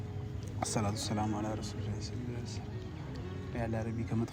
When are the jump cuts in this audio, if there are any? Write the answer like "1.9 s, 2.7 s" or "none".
none